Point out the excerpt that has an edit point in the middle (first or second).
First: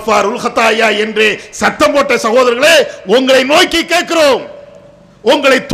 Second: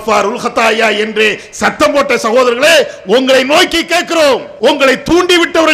second